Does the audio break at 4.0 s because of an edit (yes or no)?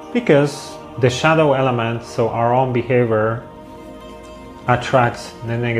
no